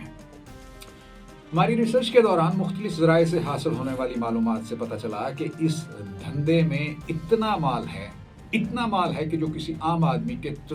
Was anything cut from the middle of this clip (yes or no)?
no